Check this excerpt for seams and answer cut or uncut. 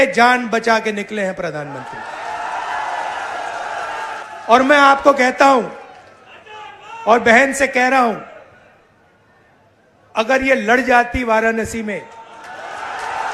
cut